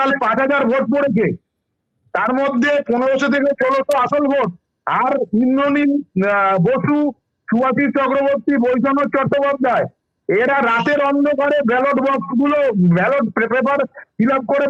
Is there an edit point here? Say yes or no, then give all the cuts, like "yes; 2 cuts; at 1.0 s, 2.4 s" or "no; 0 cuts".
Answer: no; 0 cuts